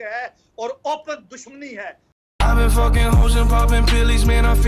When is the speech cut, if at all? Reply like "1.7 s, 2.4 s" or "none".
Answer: 2.2 s

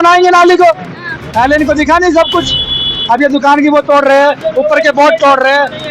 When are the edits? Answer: none

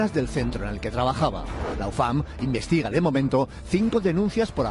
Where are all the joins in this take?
none

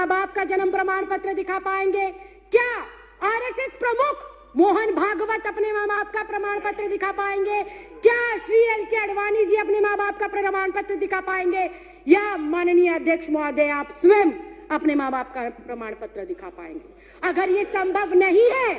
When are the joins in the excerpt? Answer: none

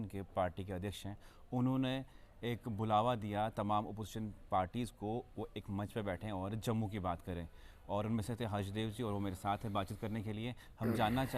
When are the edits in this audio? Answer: none

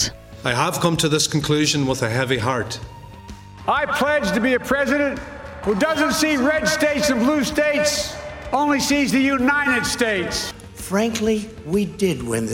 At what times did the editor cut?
3.1 s, 5.5 s, 10.4 s

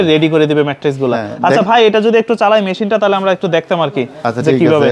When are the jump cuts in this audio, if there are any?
none

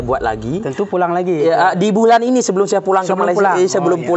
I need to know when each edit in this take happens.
none

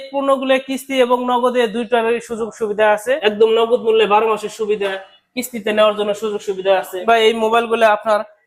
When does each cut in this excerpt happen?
3.2 s, 6.9 s

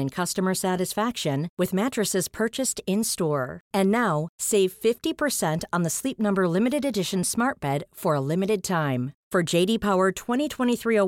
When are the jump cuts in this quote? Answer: none

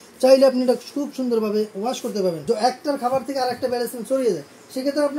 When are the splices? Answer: 2.4 s

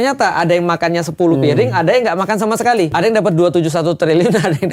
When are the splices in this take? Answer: 2.9 s

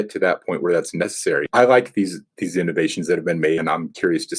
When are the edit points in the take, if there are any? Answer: 1.5 s, 3.6 s

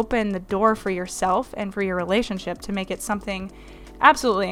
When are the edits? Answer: none

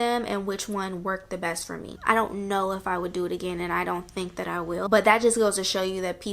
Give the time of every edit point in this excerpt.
1.9 s, 4.8 s

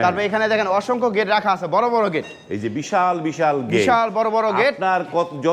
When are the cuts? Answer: none

